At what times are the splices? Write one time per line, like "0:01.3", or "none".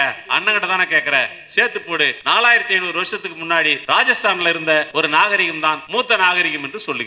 0:02.2
0:03.8
0:04.9
0:05.8